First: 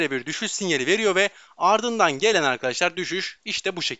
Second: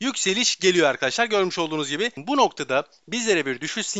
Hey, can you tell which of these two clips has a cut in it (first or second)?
second